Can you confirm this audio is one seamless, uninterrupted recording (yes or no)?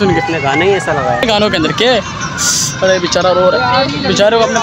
no